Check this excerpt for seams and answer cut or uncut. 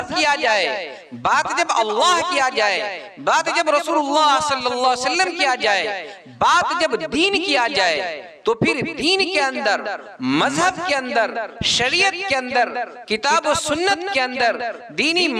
uncut